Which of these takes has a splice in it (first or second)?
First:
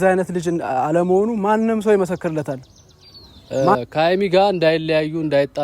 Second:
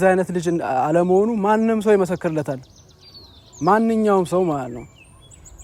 first